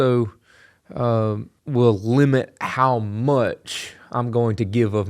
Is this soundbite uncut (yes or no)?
no